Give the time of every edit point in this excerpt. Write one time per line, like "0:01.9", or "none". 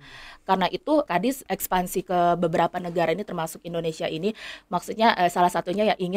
0:01.1